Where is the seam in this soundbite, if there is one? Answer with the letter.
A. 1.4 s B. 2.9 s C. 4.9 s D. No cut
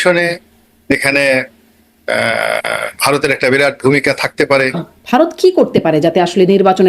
C